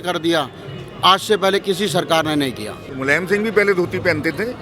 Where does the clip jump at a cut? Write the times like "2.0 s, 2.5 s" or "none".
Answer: 2.8 s